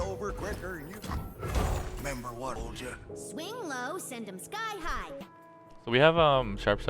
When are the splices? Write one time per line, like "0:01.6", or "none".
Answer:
0:00.9
0:02.6
0:05.2